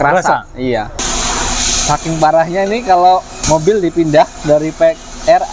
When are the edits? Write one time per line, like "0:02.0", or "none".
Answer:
0:01.1
0:03.3